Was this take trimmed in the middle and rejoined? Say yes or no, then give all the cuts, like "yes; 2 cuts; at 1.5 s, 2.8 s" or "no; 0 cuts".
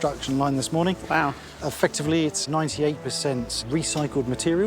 yes; 2 cuts; at 2.4 s, 3.6 s